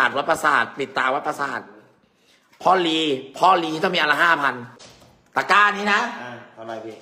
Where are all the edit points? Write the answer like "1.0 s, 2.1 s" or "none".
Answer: 4.8 s